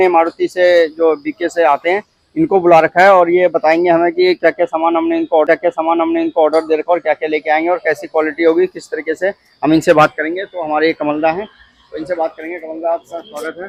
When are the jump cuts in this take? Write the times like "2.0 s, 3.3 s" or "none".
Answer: none